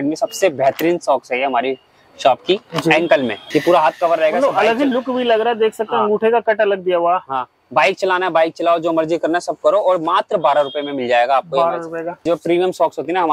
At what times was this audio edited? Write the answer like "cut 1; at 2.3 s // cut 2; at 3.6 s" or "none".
cut 1; at 3.4 s // cut 2; at 12.1 s